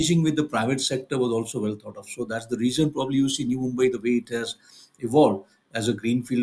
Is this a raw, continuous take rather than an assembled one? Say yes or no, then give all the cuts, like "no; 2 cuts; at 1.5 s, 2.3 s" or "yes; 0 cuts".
yes; 0 cuts